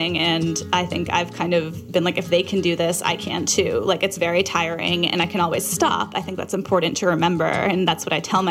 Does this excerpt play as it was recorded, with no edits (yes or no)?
yes